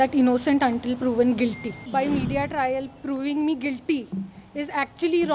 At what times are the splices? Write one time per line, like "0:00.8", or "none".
0:01.8